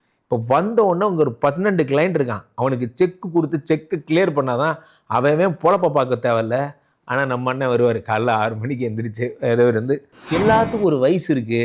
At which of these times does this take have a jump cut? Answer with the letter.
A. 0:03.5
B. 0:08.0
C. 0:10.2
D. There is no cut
C